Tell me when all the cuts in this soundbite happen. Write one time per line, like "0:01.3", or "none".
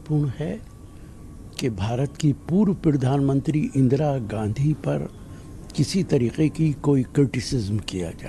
none